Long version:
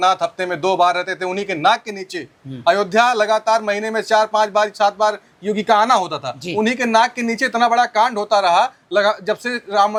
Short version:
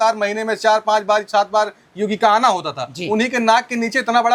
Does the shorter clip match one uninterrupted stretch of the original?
yes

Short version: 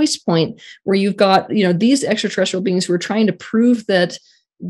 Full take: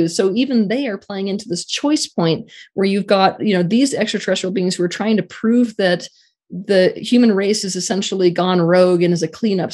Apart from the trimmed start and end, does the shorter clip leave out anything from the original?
no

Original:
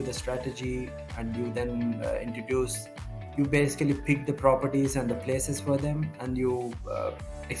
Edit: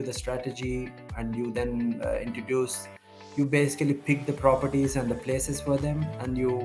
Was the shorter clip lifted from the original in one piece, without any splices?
yes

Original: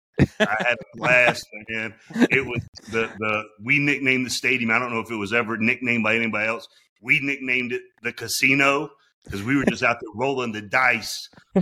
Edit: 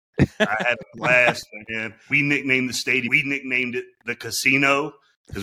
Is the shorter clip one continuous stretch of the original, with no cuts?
no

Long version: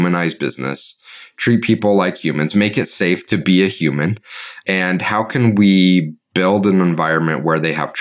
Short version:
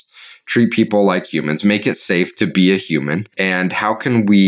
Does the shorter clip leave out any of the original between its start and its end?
yes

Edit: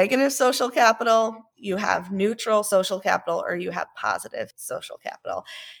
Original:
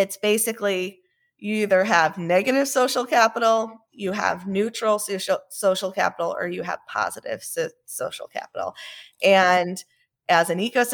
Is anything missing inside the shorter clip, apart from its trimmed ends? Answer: yes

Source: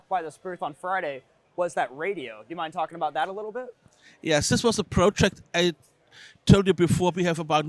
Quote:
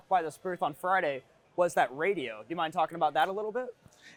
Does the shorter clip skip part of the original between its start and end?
no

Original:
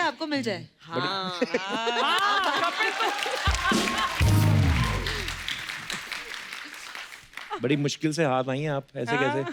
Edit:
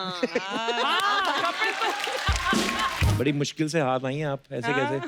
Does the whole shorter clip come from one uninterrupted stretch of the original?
no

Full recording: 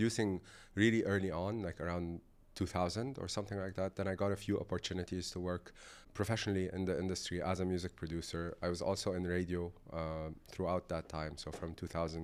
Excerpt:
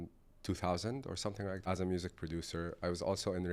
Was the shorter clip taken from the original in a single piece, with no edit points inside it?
no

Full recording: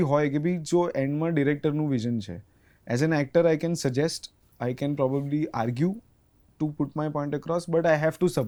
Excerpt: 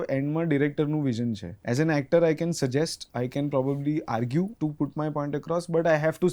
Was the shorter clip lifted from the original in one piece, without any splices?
no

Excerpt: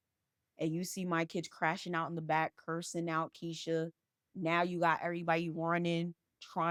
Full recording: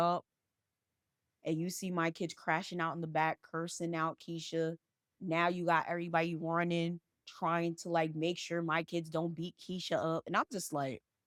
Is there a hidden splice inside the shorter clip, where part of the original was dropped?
no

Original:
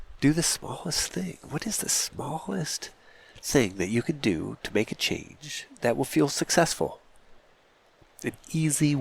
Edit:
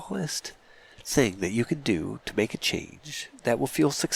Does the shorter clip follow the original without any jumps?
yes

